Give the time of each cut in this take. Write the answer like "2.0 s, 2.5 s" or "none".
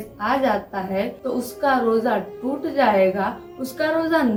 none